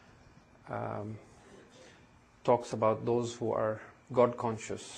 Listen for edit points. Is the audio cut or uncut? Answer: uncut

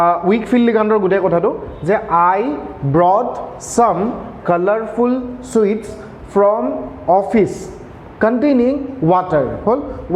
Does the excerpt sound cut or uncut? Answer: uncut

